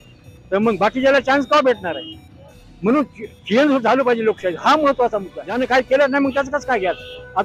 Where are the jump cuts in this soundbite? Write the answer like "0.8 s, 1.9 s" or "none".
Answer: 5.4 s